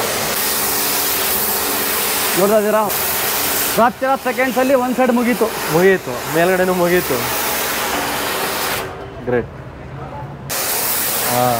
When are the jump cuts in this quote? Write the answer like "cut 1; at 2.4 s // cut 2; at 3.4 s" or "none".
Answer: none